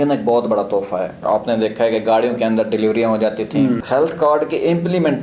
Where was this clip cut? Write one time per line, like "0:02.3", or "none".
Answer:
0:01.2
0:03.8